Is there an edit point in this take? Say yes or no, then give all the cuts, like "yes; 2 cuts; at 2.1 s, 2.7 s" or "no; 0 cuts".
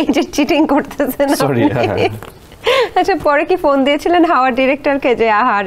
no; 0 cuts